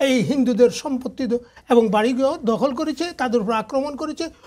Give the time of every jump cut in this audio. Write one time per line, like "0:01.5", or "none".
none